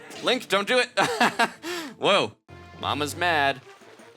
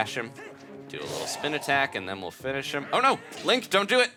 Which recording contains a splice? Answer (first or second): first